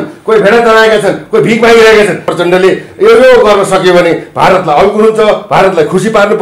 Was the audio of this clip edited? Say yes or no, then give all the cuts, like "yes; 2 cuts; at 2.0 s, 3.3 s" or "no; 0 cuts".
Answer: yes; 1 cut; at 2.3 s